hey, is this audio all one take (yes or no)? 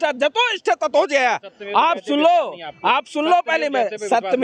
yes